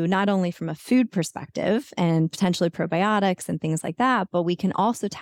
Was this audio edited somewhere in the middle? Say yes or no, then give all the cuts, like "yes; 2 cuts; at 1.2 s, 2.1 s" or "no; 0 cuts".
no; 0 cuts